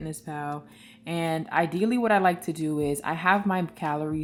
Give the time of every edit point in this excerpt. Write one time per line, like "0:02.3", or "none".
none